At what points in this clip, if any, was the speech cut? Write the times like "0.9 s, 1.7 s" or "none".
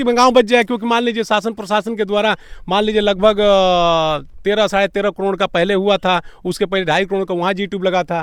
none